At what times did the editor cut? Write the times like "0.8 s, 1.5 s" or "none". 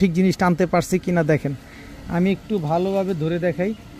none